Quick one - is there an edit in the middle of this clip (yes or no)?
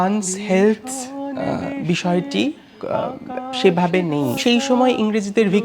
yes